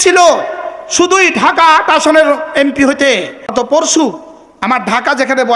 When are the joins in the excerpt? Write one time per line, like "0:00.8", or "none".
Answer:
0:03.5